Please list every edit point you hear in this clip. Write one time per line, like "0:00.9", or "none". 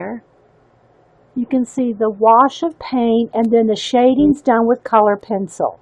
0:04.4